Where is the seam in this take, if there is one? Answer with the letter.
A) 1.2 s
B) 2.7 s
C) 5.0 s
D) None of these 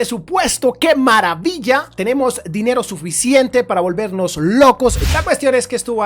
C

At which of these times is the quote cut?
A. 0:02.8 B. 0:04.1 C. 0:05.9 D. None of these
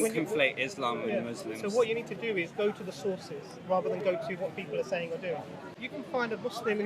C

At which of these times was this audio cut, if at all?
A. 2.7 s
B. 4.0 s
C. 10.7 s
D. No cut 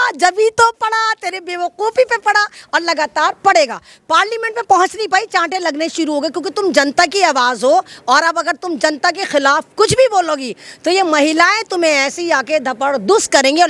D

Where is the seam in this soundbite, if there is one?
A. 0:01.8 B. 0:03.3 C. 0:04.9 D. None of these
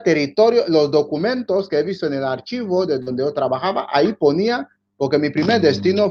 D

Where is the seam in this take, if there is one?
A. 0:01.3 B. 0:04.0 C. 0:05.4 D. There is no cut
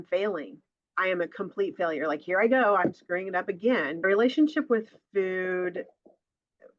B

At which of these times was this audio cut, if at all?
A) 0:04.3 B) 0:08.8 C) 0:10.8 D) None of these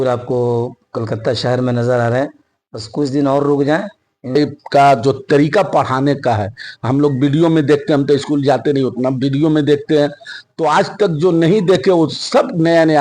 A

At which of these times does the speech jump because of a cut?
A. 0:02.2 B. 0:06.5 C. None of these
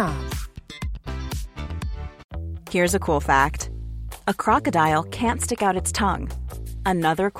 A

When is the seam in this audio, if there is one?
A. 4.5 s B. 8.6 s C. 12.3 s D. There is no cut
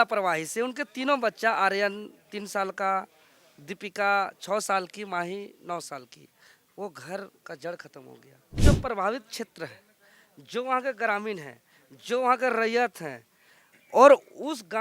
B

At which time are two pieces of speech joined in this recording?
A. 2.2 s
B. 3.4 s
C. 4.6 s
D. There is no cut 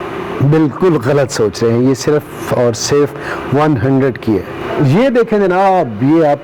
C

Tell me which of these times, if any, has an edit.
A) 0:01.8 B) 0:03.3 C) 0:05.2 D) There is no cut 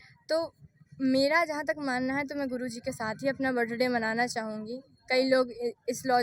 D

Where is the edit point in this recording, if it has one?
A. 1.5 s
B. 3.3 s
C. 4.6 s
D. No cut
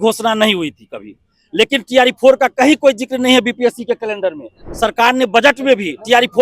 C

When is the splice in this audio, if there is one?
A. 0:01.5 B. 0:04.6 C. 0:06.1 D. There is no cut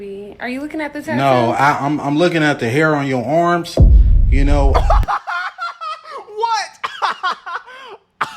A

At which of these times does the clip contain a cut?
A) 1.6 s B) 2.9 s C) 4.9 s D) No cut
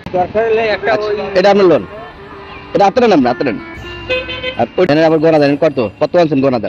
C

